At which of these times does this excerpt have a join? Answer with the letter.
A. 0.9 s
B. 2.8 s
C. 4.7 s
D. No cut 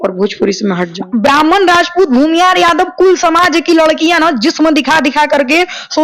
A